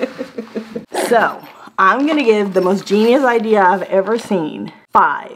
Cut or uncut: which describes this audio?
uncut